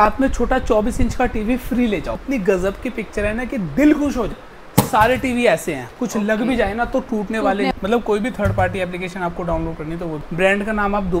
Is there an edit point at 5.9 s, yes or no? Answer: no